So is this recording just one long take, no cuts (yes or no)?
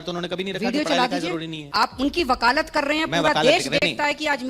no